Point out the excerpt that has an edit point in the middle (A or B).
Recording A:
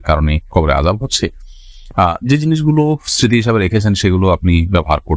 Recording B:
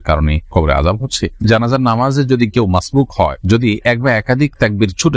B